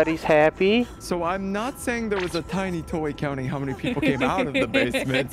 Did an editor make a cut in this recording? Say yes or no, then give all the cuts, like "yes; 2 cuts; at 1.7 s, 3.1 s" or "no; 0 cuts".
yes; 1 cut; at 1.0 s